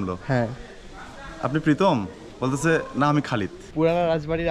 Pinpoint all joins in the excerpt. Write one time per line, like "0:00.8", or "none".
0:03.6